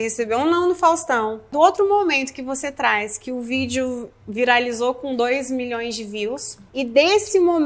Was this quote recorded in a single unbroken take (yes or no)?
no